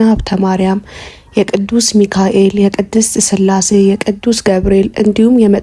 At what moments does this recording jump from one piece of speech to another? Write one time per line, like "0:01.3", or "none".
none